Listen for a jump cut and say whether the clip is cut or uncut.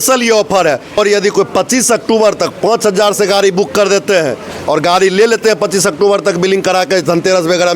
cut